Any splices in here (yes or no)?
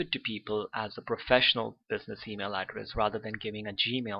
yes